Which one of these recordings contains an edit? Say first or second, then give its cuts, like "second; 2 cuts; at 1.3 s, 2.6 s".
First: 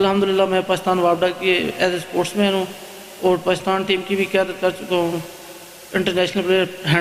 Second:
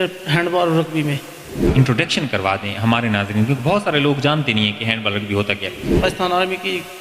second; 2 cuts; at 1.7 s, 5.9 s